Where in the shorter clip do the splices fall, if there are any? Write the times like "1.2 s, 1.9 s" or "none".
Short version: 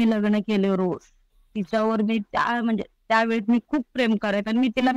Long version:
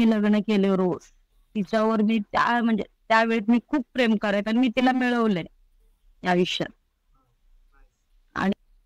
none